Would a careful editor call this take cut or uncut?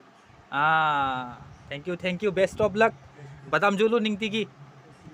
uncut